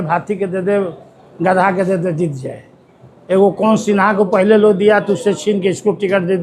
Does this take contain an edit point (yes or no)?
no